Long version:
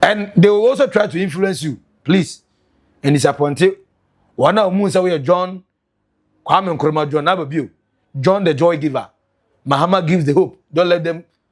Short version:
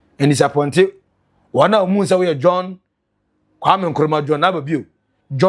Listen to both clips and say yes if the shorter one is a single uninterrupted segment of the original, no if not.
yes